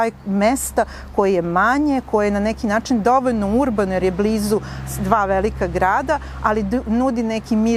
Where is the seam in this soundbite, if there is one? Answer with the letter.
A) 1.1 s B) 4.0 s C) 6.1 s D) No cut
D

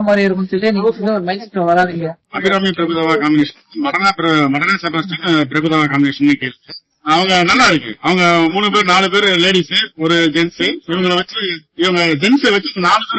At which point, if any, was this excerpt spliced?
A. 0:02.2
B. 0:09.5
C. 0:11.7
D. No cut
A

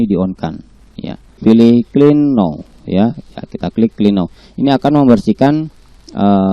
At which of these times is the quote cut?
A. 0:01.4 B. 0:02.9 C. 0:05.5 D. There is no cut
A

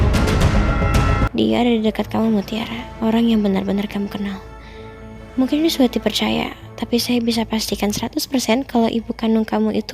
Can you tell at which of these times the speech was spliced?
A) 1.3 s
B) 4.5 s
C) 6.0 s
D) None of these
A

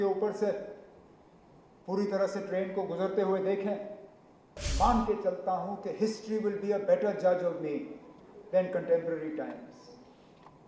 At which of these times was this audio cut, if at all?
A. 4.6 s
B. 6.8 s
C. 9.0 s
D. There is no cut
A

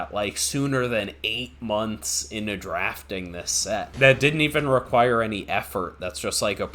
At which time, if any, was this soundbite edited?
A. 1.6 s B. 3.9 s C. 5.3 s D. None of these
B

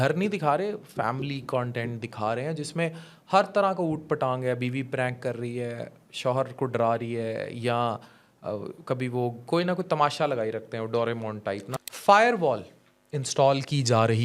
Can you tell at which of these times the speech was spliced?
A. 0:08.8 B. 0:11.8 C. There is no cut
B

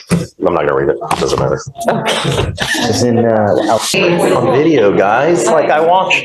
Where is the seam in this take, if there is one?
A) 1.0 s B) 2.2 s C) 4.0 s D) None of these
C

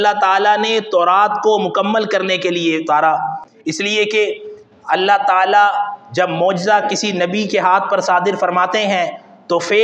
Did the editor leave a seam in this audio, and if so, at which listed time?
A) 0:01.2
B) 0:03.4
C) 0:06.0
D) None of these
B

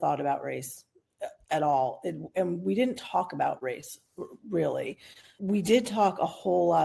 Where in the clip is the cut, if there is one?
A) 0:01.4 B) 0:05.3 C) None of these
B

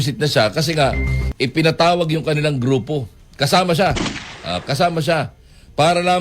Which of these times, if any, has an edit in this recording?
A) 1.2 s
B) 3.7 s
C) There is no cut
A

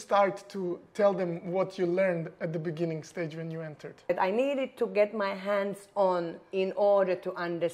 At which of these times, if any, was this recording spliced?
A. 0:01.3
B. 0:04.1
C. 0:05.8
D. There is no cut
B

